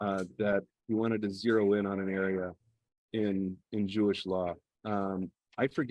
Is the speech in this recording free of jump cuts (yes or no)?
yes